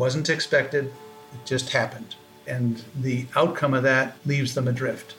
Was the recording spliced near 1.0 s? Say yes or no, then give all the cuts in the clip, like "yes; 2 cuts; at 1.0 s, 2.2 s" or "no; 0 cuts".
no; 2 cuts; at 2.9 s, 4.2 s